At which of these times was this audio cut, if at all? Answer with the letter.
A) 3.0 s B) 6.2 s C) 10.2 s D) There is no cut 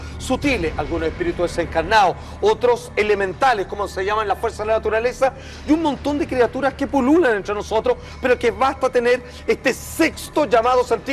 D